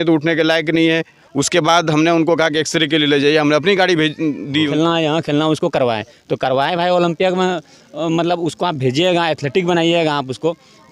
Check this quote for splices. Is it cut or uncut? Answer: cut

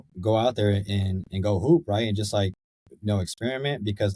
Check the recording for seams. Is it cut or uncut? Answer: uncut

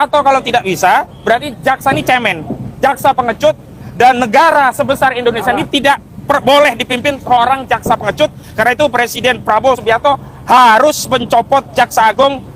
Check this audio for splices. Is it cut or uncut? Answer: uncut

